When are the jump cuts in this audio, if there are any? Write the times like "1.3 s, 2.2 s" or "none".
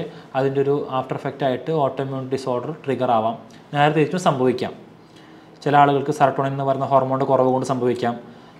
none